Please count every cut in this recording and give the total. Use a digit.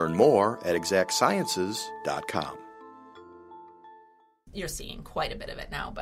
1